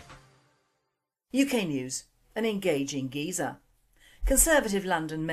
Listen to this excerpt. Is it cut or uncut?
cut